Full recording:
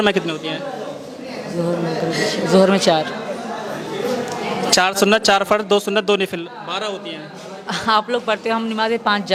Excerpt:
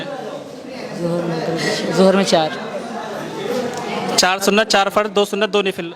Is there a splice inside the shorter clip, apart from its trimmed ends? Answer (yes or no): no